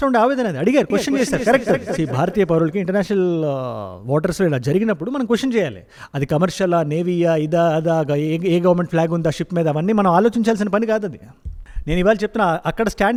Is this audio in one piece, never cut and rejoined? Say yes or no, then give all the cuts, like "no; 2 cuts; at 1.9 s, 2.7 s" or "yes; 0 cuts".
yes; 0 cuts